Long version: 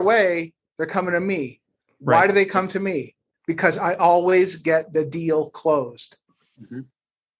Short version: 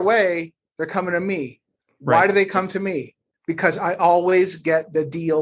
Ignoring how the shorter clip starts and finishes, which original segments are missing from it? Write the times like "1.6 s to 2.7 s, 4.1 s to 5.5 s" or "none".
none